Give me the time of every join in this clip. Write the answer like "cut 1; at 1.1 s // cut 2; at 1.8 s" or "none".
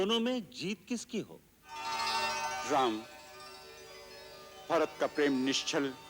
cut 1; at 1.9 s